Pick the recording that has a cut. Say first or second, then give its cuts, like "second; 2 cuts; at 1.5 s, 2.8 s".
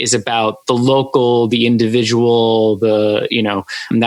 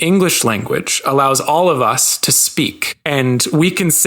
second; 1 cut; at 2.9 s